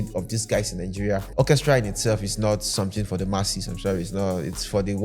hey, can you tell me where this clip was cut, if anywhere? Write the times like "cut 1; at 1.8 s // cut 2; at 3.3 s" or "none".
cut 1; at 1.3 s

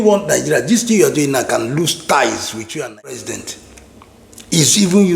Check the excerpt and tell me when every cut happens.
cut 1; at 3.2 s

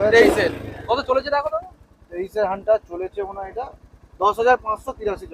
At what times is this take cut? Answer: none

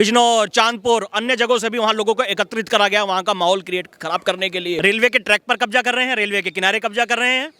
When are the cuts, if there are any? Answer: cut 1; at 4.8 s

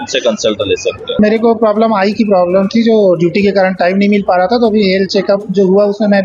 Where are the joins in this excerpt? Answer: cut 1; at 1.2 s

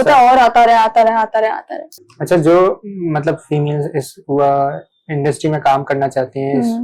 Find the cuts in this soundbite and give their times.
none

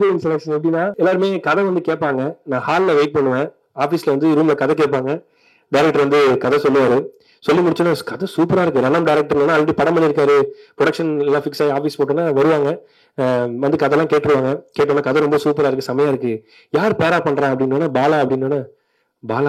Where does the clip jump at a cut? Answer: cut 1; at 0.9 s

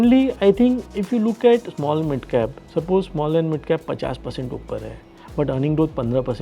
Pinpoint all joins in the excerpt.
cut 1; at 0.9 s

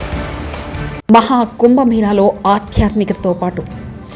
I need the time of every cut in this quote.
none

